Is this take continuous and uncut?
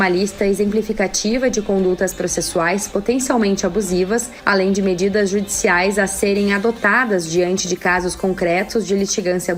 yes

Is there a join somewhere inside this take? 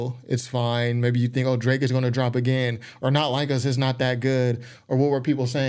no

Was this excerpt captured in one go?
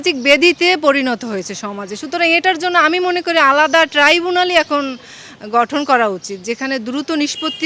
yes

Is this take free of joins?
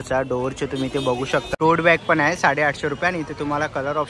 no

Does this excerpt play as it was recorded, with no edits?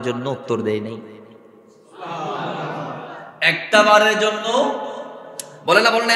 yes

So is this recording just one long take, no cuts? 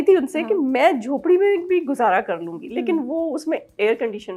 yes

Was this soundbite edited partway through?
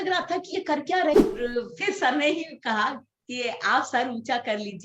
yes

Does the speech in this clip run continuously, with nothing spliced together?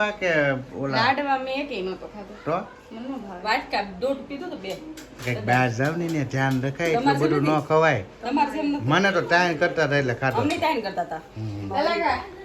yes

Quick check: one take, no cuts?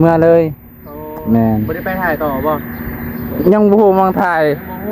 yes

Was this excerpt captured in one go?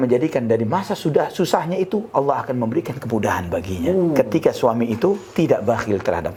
yes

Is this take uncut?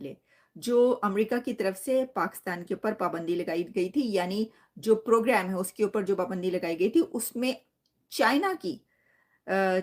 yes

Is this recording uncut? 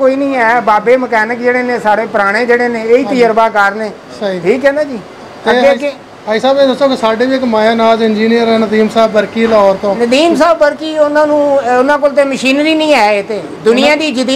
yes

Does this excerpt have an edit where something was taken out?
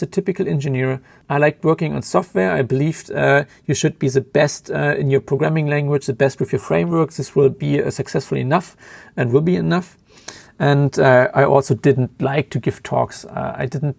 yes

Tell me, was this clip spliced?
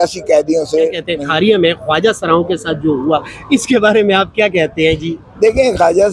yes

